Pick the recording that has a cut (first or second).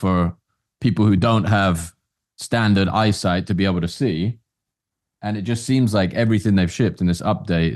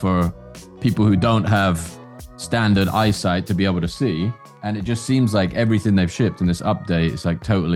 second